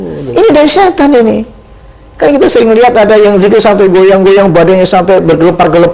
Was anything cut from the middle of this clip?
no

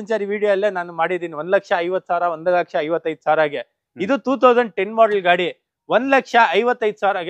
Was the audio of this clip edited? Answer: no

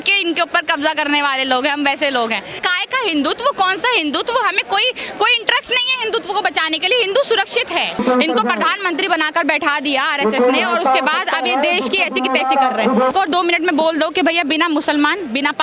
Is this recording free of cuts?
no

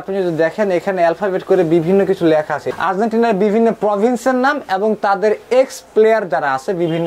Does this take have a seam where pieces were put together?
yes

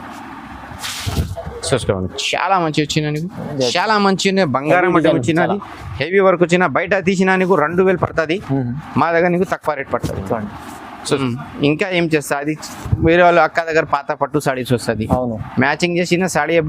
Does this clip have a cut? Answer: yes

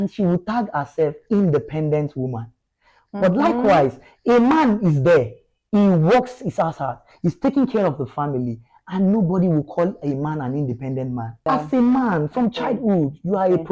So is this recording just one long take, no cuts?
no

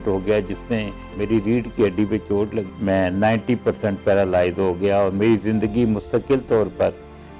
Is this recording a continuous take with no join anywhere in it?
no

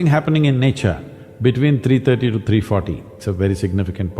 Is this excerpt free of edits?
no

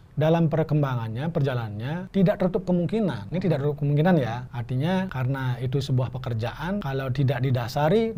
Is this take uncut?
no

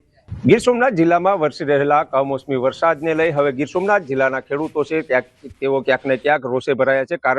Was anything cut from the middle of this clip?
yes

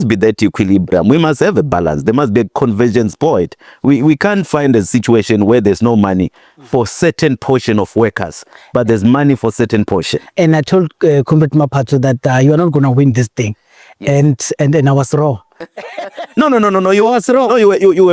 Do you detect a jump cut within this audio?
no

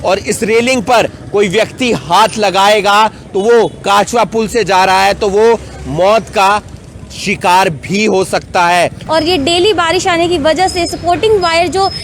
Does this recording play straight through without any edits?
no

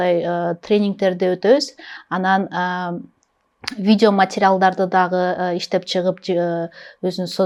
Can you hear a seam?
no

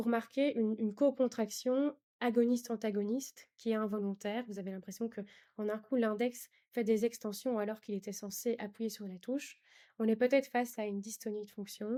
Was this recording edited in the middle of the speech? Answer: no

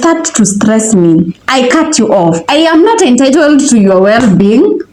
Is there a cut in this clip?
no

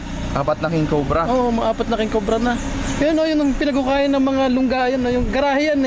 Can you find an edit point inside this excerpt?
no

